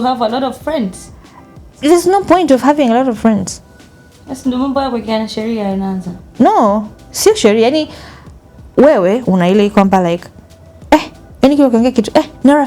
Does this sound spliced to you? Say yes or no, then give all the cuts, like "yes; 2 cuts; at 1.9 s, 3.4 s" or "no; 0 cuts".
no; 0 cuts